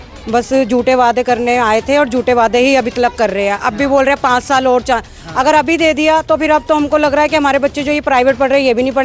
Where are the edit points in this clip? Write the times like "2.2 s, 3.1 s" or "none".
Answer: none